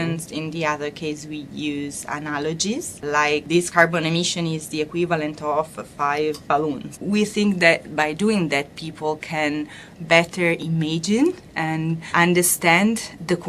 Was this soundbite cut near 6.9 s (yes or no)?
yes